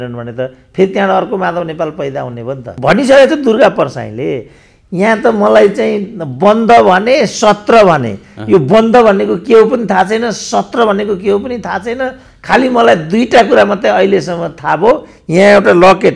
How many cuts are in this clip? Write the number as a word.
one